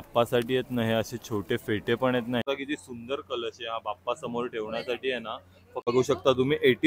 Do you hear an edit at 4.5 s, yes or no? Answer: no